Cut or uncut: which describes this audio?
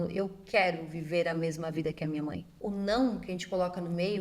cut